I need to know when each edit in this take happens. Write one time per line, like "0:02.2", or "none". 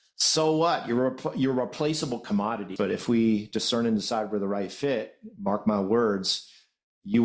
0:02.7